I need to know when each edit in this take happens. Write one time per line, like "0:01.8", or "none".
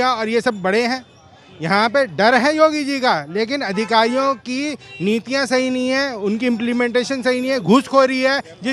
none